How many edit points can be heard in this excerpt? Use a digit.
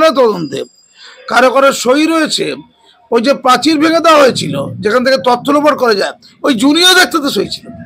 0